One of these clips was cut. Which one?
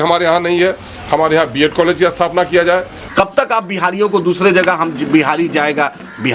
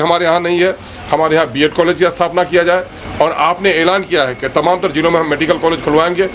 first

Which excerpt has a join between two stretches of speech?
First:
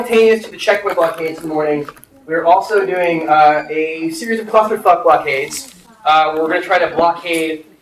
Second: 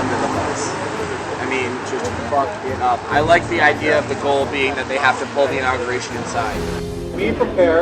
second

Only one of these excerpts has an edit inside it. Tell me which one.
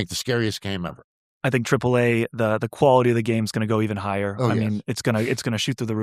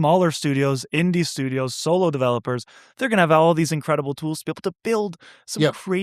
first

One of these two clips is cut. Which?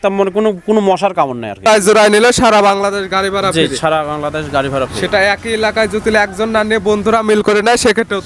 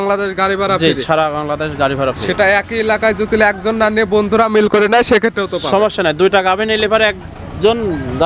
first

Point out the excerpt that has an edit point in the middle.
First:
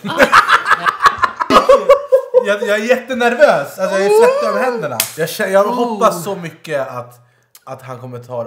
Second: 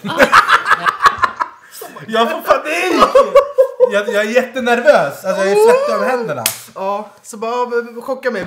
first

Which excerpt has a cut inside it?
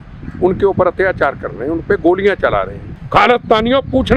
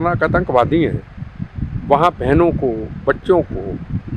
first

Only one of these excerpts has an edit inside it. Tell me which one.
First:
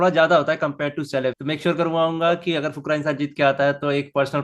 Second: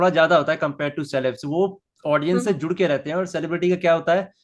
first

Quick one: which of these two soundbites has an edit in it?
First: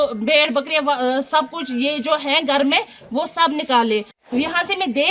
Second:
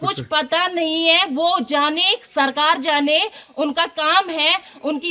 first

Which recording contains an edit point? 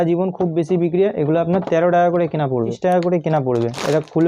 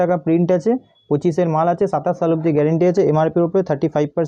first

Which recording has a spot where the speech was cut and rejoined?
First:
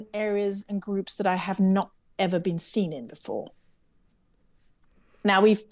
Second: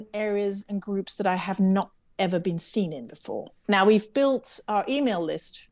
second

